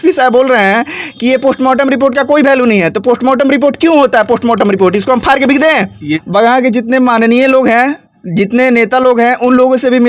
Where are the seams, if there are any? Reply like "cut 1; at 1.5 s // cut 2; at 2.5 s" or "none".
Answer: cut 1; at 6.1 s